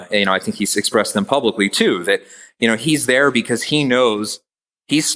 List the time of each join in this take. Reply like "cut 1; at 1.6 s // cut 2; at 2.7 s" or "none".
none